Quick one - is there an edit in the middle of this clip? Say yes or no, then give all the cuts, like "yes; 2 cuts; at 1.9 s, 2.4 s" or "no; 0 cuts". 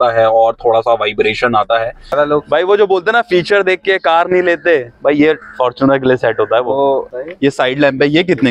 yes; 2 cuts; at 2.1 s, 7.1 s